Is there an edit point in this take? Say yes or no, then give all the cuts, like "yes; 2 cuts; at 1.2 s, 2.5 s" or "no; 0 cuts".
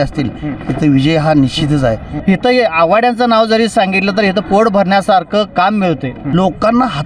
yes; 2 cuts; at 2.1 s, 6.2 s